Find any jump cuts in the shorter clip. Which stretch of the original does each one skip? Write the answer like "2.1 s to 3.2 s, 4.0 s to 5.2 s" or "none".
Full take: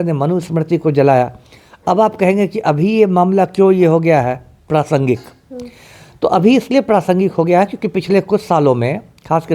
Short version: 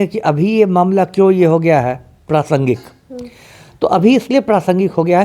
none

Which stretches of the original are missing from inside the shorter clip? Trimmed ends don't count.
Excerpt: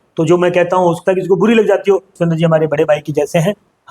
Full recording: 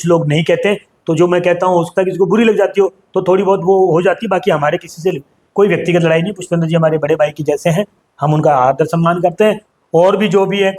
3.0 s to 6.4 s

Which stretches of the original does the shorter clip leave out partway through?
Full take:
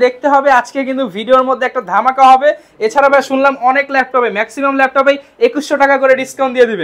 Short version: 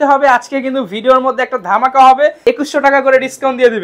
2.6 s to 5.3 s

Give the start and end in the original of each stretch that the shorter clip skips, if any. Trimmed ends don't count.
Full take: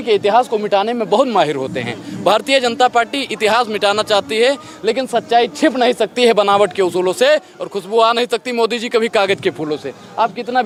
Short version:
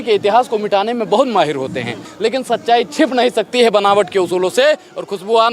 2.1 s to 4.7 s

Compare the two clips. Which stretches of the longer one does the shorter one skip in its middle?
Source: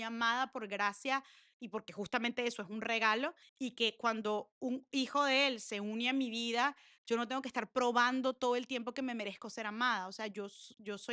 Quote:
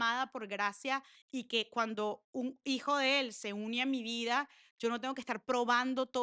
1.4 s to 3.4 s

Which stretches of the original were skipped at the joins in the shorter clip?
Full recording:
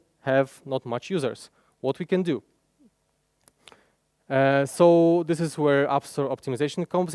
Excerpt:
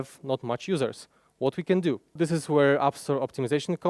2.6 s to 5.2 s

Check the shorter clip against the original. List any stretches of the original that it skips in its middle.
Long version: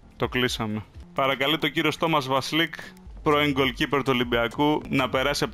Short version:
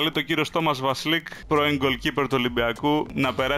2.8 s to 3.1 s

